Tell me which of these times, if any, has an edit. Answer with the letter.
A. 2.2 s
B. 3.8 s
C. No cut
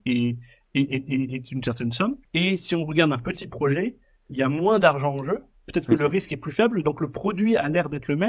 A